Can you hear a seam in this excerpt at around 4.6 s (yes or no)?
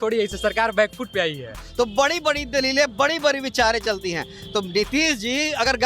no